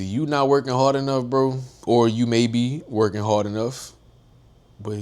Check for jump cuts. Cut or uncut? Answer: cut